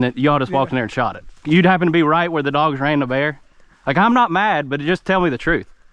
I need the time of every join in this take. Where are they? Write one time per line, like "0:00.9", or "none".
0:01.3